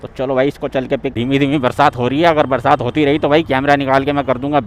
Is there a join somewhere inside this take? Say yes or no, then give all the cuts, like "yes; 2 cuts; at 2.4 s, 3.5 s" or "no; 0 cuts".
yes; 1 cut; at 1.1 s